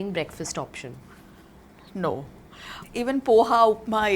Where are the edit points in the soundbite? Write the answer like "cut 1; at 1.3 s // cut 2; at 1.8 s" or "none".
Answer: cut 1; at 2.8 s